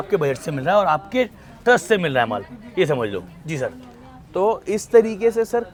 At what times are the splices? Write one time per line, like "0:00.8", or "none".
none